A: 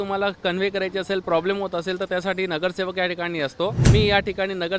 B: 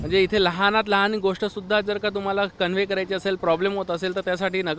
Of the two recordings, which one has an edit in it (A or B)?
A